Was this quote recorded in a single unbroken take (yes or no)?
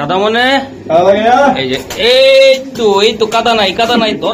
yes